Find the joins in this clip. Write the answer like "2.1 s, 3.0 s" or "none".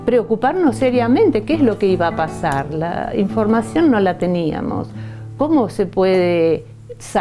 none